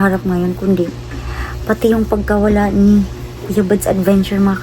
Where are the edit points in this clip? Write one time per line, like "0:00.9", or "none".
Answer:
none

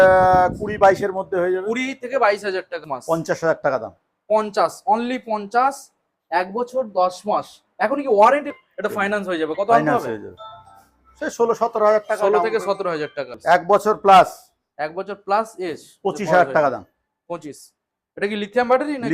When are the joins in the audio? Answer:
0:02.9
0:08.5
0:13.3

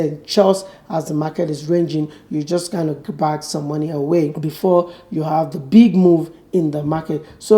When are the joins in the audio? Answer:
0:04.4

